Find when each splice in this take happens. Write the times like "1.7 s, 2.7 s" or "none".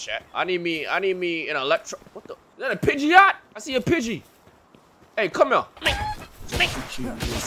none